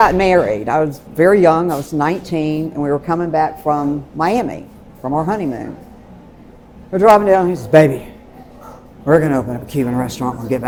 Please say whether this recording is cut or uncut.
uncut